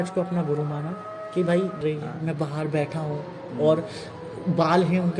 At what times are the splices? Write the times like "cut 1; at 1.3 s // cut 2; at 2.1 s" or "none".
cut 1; at 1.8 s